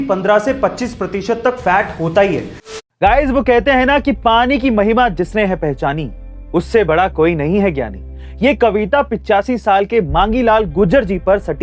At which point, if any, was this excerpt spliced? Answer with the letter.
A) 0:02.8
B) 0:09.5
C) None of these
A